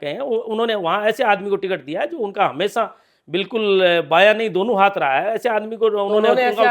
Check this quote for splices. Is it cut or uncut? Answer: uncut